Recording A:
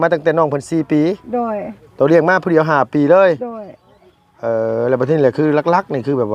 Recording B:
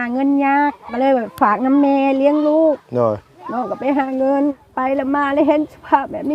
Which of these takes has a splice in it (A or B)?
B